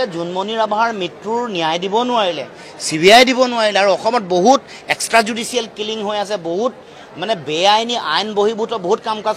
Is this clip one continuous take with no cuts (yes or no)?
yes